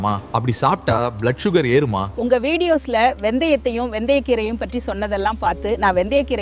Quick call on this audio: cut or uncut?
cut